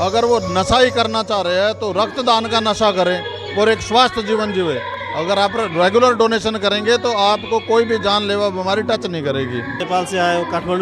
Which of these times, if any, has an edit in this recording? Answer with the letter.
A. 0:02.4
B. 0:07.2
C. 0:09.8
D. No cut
C